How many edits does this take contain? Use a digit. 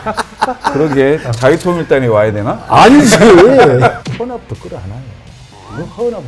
1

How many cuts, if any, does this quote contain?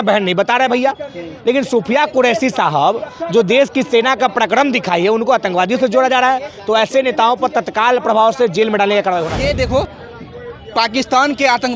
1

